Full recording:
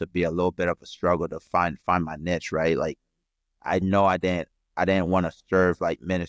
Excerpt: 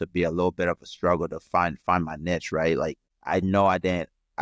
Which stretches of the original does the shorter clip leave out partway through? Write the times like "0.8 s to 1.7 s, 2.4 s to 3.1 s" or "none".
3.1 s to 3.5 s